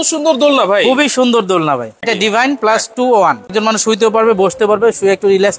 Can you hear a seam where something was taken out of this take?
yes; 2 cuts; at 2.0 s, 3.5 s

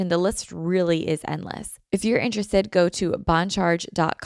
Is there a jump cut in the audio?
yes; 1 cut; at 1.7 s

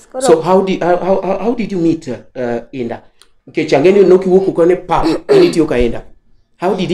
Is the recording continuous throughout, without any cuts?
yes; 0 cuts

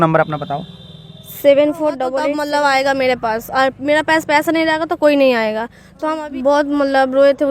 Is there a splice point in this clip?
yes; 2 cuts; at 2.2 s, 6.1 s

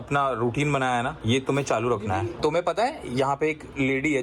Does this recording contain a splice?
yes; 1 cut; at 2.3 s

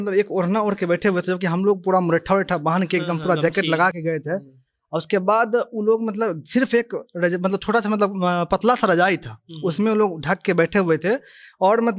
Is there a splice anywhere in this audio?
no; 0 cuts

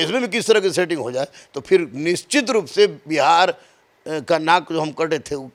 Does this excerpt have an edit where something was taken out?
no; 0 cuts

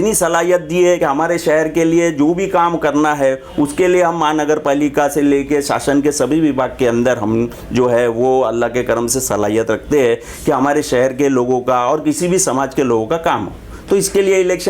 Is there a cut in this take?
no; 0 cuts

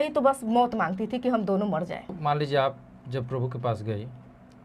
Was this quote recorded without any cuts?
yes; 0 cuts

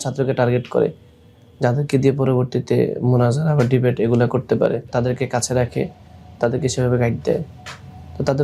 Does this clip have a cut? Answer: yes; 1 cut; at 4.9 s

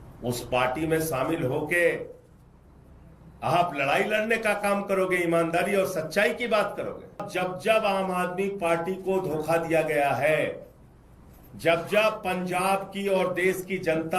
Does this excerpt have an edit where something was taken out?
yes; 1 cut; at 7.3 s

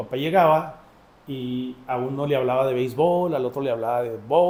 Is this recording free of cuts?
yes; 0 cuts

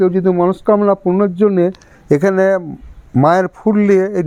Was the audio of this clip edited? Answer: no; 0 cuts

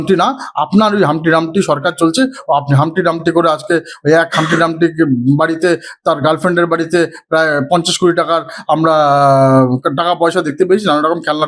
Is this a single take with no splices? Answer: yes; 0 cuts

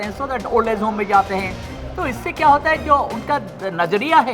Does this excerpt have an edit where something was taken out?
no; 0 cuts

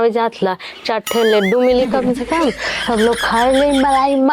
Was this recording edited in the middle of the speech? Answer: no; 0 cuts

